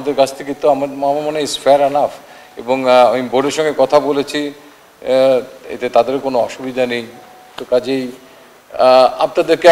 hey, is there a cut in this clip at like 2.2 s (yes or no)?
no